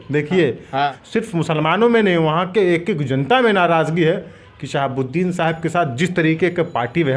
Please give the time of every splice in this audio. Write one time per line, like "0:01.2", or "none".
0:01.0